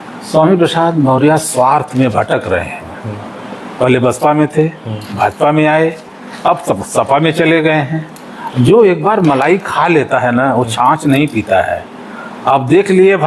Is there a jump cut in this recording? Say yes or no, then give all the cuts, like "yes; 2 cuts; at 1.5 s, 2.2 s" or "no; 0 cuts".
yes; 1 cut; at 1.4 s